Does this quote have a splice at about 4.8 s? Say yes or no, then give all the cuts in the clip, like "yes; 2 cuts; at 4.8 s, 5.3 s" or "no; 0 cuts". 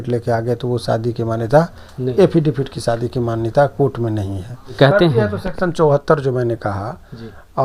yes; 1 cut; at 4.8 s